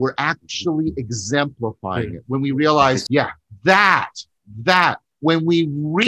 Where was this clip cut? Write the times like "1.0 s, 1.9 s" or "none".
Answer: 3.0 s